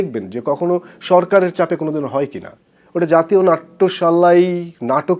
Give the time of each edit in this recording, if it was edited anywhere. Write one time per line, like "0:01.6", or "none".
none